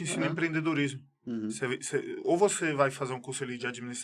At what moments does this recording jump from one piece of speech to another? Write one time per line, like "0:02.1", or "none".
none